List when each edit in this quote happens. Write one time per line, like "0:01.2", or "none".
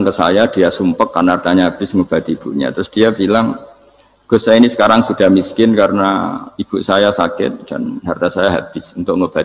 none